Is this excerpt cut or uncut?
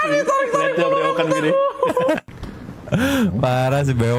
uncut